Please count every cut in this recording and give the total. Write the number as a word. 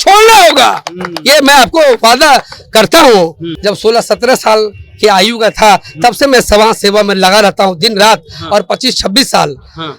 one